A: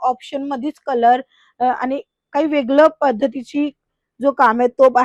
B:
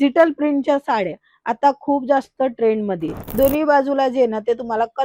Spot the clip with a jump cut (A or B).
B